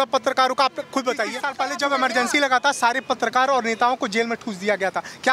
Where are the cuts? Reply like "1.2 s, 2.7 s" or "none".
1.4 s